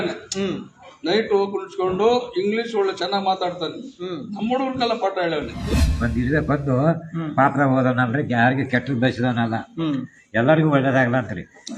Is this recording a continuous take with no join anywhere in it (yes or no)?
no